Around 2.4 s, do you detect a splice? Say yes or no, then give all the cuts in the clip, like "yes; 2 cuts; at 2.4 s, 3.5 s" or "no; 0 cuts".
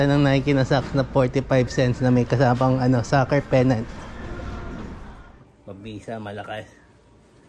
no; 1 cut; at 5.1 s